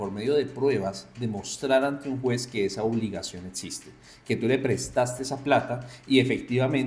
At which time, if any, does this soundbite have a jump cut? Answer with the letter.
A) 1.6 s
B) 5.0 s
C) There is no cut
C